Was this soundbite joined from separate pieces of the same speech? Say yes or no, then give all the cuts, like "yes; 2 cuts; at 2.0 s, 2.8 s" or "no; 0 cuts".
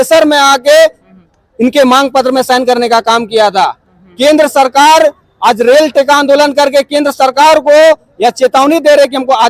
no; 0 cuts